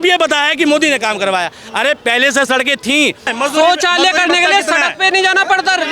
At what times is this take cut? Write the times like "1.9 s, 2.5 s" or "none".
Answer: 3.3 s